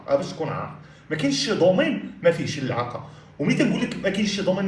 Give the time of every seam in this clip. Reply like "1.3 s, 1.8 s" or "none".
none